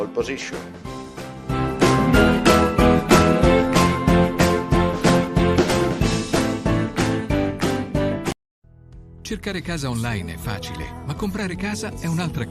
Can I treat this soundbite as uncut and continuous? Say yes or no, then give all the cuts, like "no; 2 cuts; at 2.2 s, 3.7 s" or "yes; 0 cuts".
no; 1 cut; at 8.3 s